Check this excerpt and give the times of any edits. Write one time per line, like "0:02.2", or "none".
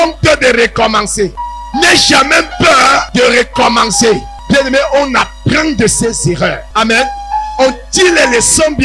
0:01.4
0:03.1
0:04.3
0:06.6

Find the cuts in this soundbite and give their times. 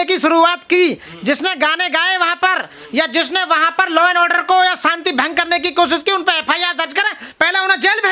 none

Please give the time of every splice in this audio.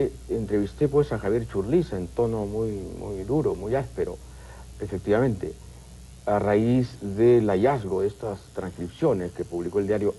none

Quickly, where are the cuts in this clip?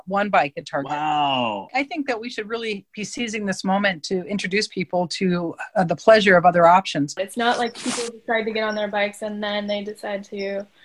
0:01.7
0:07.2

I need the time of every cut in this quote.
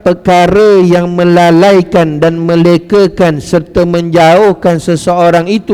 none

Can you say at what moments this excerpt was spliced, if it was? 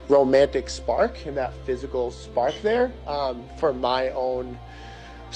0:03.8

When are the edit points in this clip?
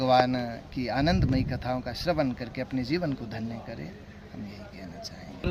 none

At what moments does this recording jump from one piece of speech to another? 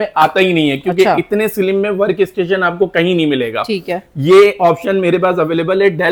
none

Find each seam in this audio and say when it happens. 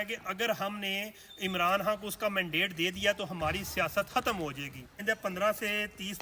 0:05.0

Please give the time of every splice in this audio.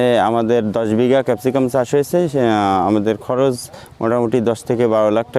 none

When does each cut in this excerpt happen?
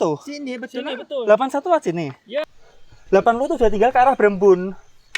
0:02.5

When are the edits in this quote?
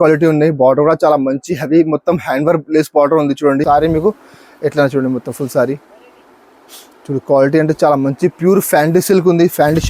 0:03.6

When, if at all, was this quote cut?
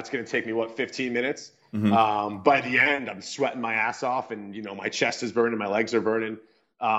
none

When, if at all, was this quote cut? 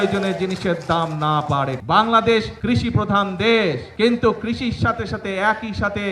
0:01.8
0:02.5
0:03.9

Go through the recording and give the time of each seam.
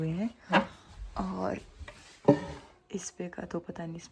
none

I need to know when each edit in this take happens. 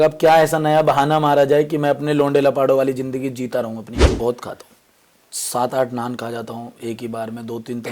0:04.0

